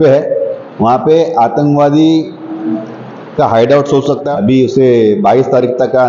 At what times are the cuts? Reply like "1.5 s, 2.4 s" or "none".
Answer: 4.3 s